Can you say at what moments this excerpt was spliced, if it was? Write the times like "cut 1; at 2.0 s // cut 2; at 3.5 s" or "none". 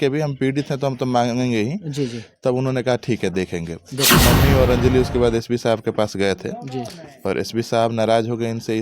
cut 1; at 4.1 s